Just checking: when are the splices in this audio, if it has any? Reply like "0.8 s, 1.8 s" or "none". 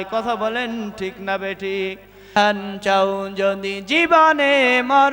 2.4 s